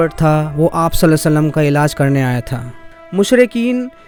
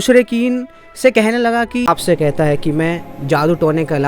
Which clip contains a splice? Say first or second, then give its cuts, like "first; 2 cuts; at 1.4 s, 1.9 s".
second; 1 cut; at 1.8 s